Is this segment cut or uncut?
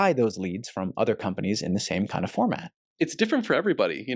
cut